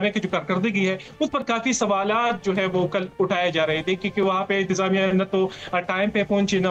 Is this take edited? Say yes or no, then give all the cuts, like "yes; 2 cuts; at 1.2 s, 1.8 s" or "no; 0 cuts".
no; 0 cuts